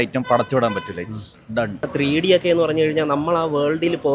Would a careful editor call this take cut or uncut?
cut